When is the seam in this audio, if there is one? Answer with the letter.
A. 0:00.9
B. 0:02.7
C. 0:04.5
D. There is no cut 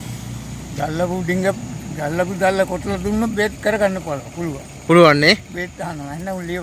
D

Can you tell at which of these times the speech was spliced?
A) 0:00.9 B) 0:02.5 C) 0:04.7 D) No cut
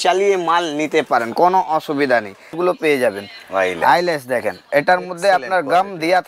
B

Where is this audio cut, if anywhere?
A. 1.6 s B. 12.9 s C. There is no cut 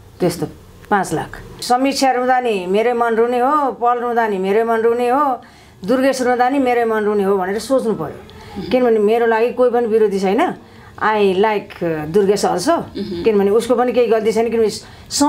A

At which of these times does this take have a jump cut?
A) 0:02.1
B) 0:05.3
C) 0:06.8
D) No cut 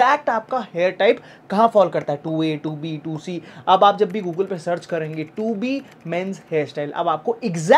D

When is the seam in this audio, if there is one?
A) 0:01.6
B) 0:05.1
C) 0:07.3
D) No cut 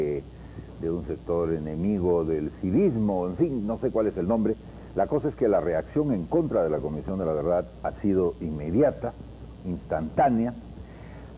A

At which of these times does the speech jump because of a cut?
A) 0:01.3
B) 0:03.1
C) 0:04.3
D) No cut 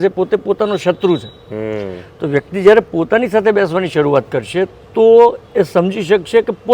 D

